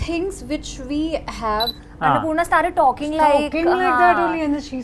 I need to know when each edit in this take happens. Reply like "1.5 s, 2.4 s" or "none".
1.7 s